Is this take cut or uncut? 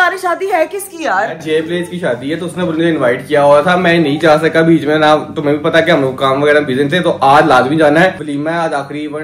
uncut